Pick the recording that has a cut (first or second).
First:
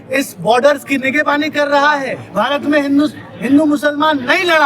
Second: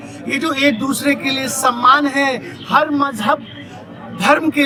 first